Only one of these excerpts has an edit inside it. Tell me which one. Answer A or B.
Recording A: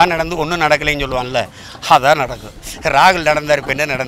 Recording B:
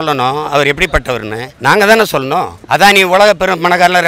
B